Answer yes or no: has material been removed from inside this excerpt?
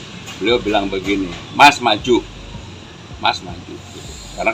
no